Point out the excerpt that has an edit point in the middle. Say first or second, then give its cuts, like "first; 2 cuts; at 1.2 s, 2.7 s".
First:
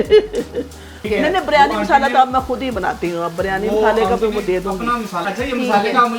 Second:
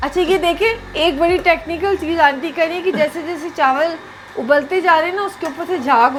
first; 2 cuts; at 1.0 s, 5.2 s